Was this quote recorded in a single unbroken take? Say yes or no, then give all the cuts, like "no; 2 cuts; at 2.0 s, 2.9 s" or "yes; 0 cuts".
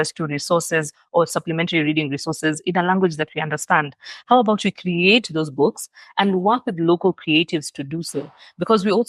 yes; 0 cuts